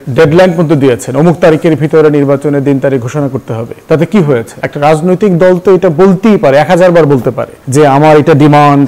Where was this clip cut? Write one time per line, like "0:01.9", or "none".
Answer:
none

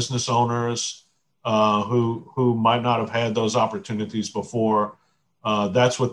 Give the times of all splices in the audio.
none

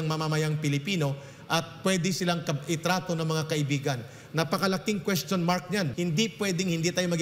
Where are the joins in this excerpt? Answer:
0:05.9

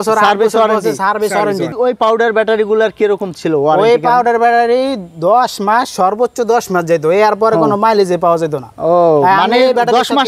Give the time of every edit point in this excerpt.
none

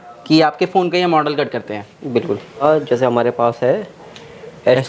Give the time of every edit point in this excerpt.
0:02.6

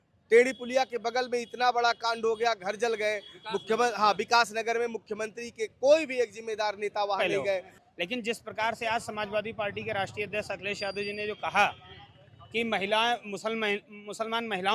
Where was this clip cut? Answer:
0:07.8

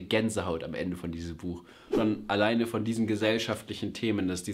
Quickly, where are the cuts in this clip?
0:01.8

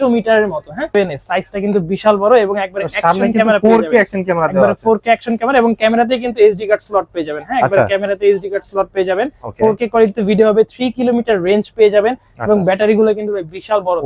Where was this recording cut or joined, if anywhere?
0:00.9

